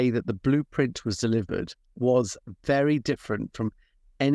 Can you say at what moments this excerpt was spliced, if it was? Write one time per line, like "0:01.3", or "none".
0:01.8